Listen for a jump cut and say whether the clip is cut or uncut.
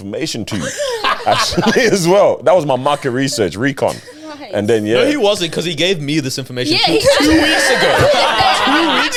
uncut